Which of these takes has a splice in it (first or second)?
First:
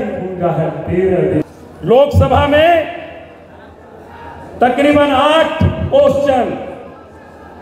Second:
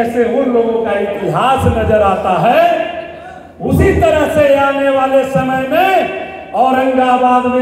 first